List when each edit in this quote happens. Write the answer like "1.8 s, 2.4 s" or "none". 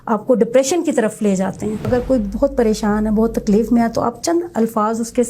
1.9 s